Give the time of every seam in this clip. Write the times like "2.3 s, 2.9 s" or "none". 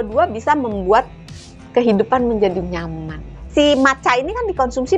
3.3 s